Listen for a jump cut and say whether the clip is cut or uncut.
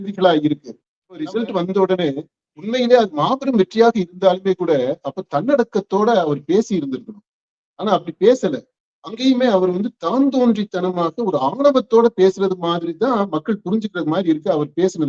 cut